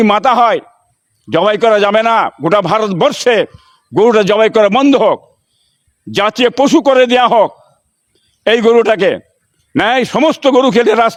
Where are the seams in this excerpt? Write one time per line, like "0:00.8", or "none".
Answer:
none

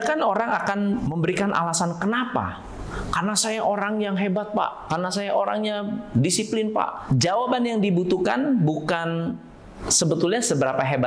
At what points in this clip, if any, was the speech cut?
0:01.0
0:07.0

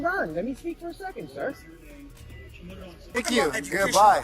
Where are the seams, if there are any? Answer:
0:03.3

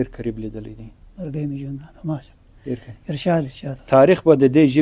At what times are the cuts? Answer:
none

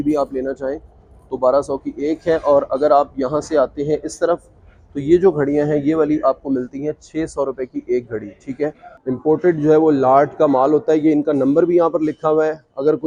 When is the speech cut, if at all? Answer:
none

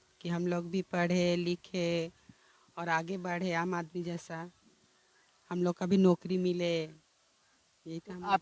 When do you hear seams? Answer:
none

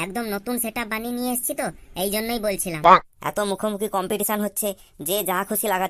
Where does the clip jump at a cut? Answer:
0:03.1

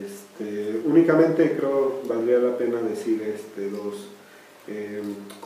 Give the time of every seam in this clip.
0:01.2

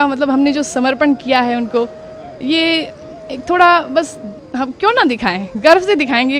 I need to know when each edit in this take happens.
none

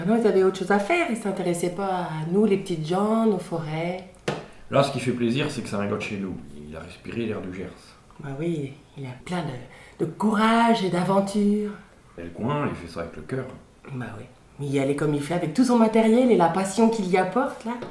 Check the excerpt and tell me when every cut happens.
none

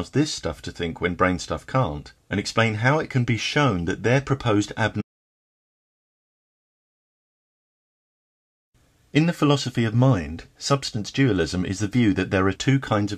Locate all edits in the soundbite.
none

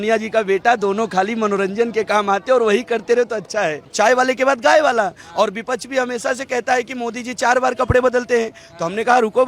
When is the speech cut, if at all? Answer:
0:03.9

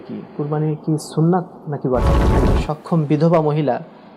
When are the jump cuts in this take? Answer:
0:02.3

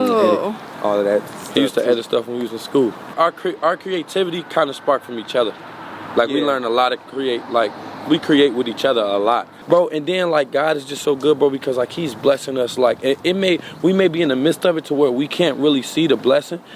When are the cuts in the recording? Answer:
0:03.1
0:09.5

